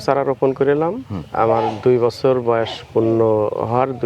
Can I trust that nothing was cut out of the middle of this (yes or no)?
yes